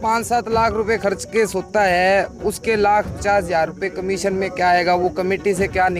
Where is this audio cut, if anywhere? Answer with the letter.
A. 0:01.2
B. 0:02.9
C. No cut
C